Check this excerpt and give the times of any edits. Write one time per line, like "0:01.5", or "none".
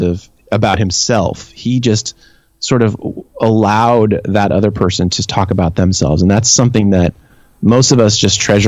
none